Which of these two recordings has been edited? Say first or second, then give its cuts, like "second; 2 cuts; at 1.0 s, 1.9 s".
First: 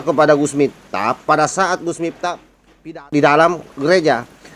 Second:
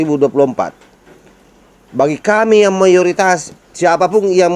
first; 1 cut; at 3.0 s